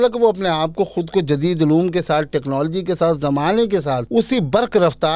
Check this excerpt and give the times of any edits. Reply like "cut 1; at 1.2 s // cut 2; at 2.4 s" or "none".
cut 1; at 4.0 s